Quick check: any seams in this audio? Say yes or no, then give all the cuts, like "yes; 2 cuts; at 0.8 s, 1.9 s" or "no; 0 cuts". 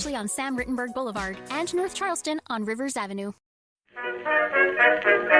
yes; 1 cut; at 3.5 s